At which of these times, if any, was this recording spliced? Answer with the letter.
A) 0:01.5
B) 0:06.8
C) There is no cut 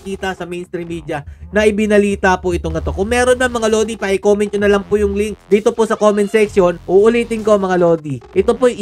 B